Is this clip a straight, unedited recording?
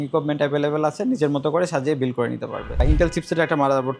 no; 1 cut; at 2.7 s

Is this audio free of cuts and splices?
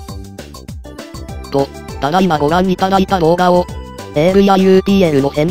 yes; 0 cuts

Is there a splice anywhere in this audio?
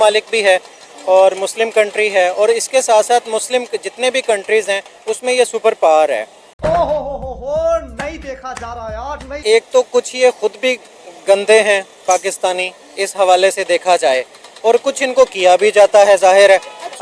yes; 1 cut; at 9.3 s

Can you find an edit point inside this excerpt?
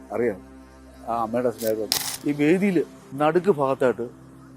yes; 2 cuts; at 1.9 s, 3.0 s

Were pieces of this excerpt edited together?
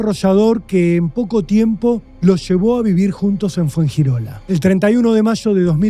yes; 2 cuts; at 2.1 s, 4.3 s

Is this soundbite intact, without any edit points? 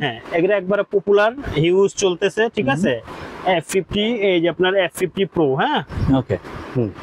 yes; 0 cuts

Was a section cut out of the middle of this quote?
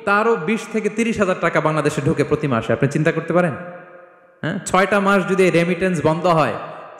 no; 0 cuts

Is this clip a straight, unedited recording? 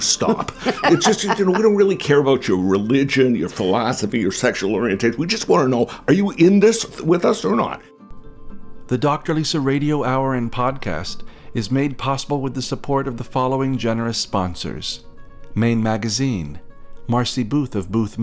no; 2 cuts; at 6.9 s, 8.1 s

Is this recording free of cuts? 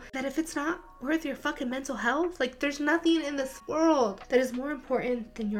no; 2 cuts; at 3.6 s, 4.2 s

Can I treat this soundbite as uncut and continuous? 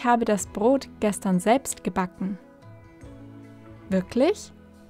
yes; 0 cuts

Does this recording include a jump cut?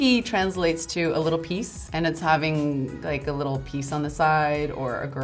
no; 0 cuts

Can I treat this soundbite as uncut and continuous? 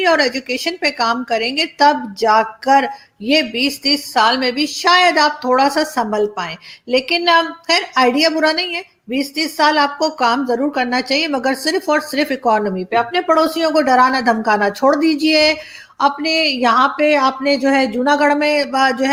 yes; 0 cuts

